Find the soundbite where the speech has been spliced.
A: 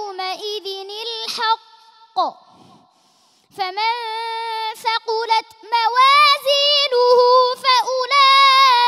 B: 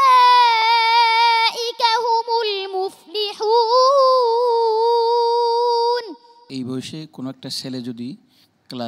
B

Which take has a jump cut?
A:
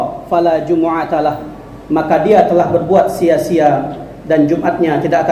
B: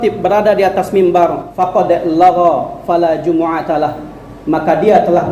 B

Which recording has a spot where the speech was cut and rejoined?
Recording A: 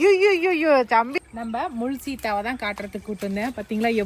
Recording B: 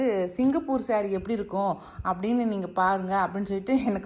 A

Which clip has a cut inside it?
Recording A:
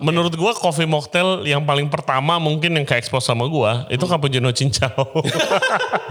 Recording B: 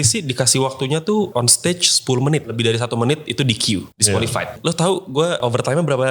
B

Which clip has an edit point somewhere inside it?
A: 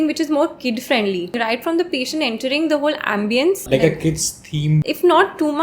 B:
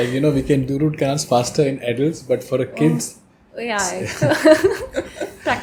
A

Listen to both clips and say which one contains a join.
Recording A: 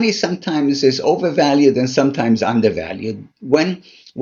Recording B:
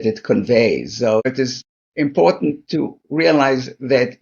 B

